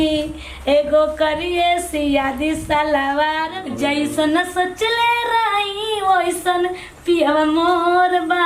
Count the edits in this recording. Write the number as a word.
one